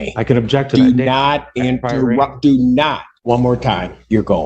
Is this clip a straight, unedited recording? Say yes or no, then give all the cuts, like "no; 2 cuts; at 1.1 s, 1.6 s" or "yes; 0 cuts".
no; 1 cut; at 3.1 s